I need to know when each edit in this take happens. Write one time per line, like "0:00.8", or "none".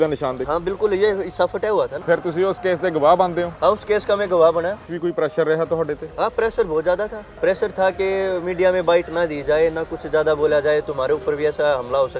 0:02.0
0:04.9
0:07.2